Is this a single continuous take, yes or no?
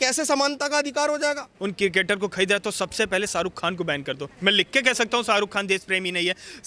no